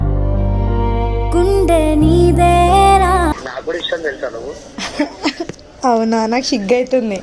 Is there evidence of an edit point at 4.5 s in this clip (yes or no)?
no